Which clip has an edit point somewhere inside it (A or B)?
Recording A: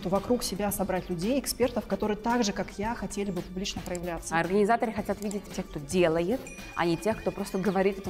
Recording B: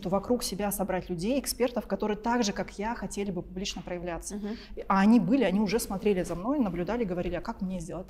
A